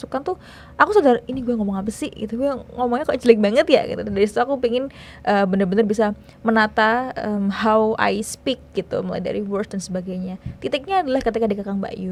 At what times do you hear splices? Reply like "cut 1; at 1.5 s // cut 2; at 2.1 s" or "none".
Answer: none